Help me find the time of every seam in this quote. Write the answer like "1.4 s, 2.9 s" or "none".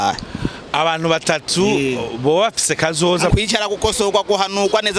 3.3 s